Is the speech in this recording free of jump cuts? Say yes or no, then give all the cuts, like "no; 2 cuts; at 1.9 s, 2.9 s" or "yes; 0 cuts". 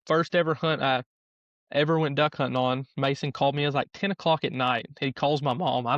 yes; 0 cuts